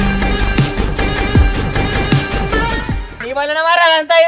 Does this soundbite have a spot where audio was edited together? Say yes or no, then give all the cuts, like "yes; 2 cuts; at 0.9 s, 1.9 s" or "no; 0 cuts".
yes; 1 cut; at 3.1 s